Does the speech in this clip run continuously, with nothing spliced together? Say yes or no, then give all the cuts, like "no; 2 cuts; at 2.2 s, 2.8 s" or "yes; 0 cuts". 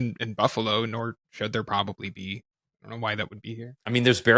yes; 0 cuts